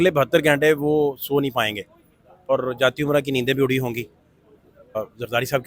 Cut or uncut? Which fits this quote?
cut